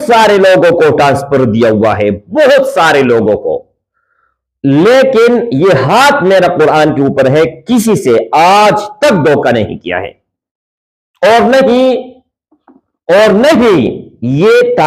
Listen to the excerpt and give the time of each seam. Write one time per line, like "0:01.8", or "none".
none